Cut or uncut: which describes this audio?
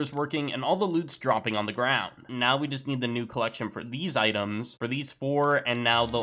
cut